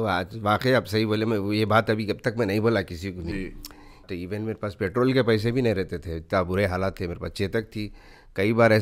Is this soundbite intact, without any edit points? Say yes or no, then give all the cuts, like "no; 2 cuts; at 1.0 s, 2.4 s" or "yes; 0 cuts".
no; 1 cut; at 4.1 s